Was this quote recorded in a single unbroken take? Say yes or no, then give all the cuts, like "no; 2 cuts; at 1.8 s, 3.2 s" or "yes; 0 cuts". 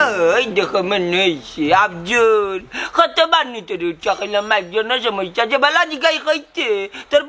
yes; 0 cuts